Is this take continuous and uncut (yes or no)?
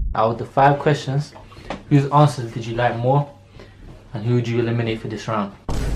yes